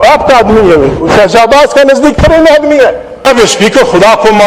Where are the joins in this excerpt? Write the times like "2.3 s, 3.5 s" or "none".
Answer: 3.1 s